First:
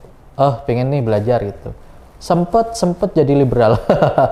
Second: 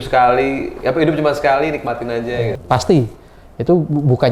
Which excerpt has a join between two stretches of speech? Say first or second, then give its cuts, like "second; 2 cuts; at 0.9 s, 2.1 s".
second; 1 cut; at 2.6 s